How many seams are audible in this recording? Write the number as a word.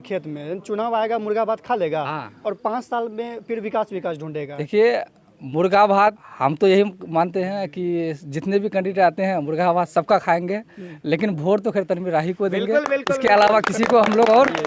two